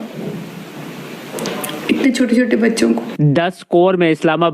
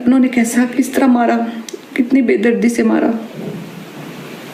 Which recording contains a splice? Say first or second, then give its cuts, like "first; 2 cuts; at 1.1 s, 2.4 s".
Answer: first; 1 cut; at 3.1 s